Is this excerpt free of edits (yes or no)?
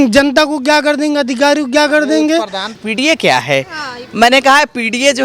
no